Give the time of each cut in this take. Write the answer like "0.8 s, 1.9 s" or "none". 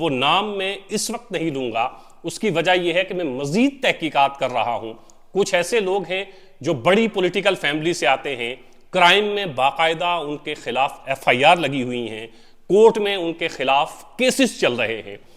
none